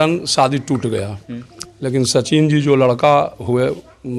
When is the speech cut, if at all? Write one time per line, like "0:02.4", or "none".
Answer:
none